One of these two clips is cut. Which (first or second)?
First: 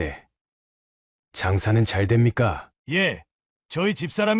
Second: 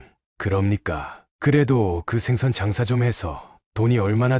first